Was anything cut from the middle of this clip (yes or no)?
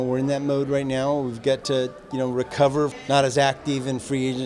yes